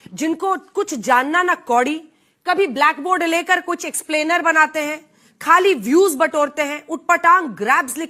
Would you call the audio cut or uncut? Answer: uncut